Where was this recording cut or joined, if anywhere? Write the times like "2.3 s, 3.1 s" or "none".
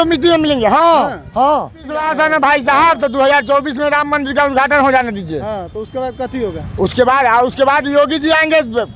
2.1 s